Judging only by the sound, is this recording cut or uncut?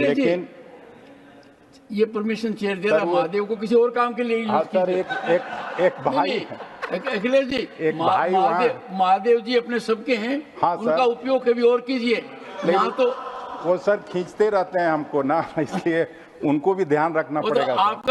uncut